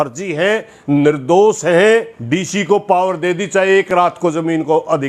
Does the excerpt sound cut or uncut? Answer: cut